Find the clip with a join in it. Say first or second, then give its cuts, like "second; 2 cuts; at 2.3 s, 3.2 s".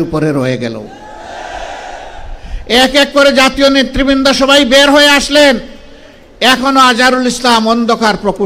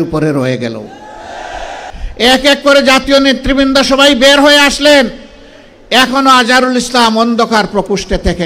second; 1 cut; at 1.9 s